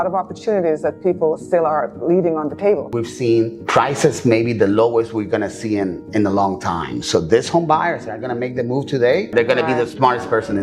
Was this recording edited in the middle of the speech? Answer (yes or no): yes